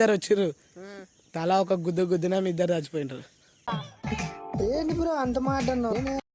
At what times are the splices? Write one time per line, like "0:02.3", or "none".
none